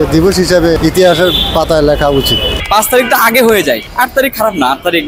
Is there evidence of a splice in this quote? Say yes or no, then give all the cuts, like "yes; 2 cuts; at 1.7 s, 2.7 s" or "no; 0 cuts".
yes; 3 cuts; at 0.8 s, 2.6 s, 3.9 s